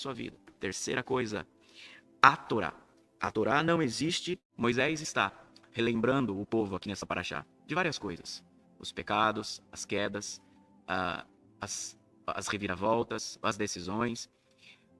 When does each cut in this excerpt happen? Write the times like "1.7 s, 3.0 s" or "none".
4.5 s